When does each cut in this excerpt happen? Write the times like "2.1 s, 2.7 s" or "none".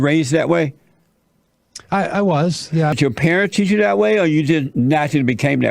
3.0 s